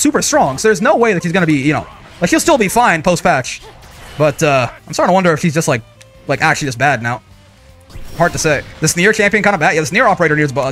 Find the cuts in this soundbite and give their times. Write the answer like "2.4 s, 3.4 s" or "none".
8.7 s